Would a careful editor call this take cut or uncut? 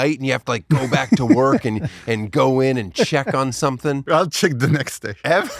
cut